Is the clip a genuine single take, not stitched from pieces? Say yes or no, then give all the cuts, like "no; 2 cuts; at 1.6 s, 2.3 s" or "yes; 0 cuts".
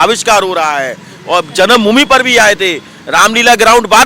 yes; 0 cuts